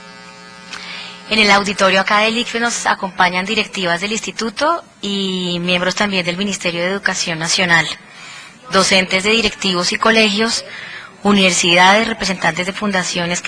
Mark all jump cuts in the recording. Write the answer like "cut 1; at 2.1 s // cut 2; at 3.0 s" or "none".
cut 1; at 3.4 s

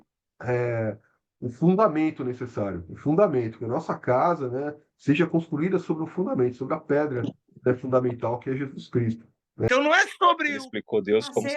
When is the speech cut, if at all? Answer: cut 1; at 9.7 s

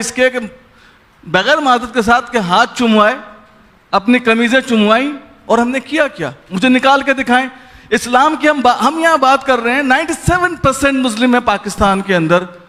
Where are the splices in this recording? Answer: none

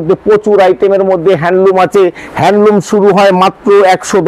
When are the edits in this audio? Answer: none

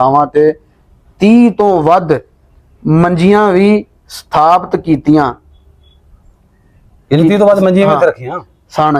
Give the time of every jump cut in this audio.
none

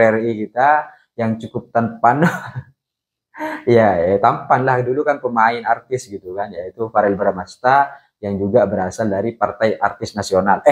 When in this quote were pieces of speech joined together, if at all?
none

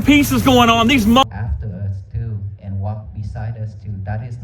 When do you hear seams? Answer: cut 1; at 1.2 s

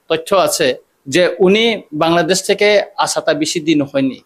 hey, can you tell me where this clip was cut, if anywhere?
cut 1; at 0.9 s

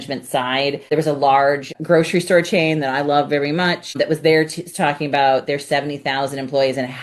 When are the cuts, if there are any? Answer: cut 1; at 0.8 s // cut 2; at 1.7 s // cut 3; at 3.9 s

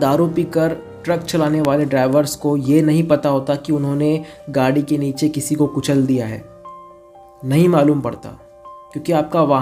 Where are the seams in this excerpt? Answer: none

